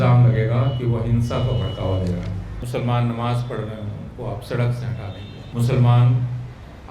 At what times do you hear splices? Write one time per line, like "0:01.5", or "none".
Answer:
0:02.5
0:05.4